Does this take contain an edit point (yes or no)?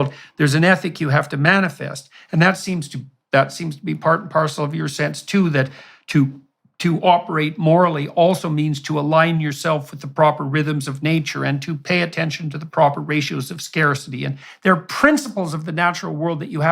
yes